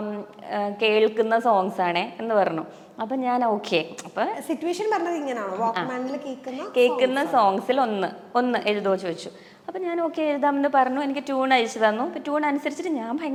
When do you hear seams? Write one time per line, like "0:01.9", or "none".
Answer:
none